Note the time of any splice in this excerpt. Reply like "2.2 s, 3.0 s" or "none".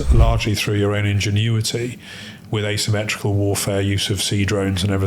none